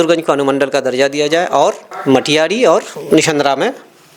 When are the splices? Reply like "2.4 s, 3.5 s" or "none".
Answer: 1.9 s, 2.9 s